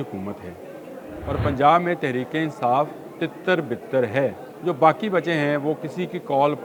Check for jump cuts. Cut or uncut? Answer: cut